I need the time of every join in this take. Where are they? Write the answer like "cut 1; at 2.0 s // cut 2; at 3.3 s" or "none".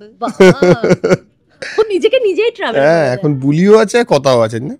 none